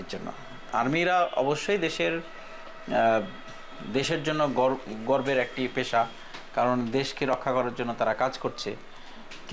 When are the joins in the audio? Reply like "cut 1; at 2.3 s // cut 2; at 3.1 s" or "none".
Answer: none